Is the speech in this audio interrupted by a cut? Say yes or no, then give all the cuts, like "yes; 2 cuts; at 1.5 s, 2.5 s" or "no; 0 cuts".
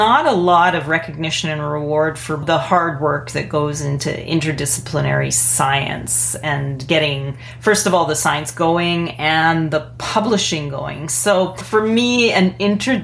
yes; 2 cuts; at 2.4 s, 11.6 s